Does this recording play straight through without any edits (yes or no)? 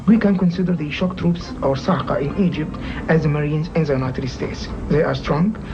no